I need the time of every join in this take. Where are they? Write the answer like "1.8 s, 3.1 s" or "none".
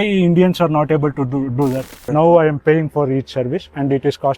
2.0 s